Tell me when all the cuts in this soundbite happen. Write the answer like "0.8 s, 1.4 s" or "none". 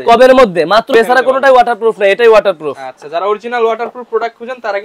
0.9 s